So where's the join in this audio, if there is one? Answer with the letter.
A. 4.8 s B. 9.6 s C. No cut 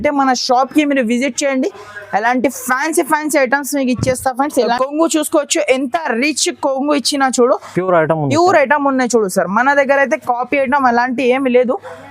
A